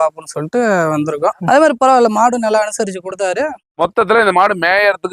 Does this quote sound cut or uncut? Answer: cut